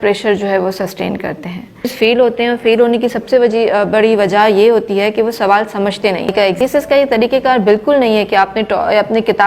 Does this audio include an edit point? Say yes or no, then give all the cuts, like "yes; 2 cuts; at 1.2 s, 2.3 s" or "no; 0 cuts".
yes; 2 cuts; at 1.9 s, 6.6 s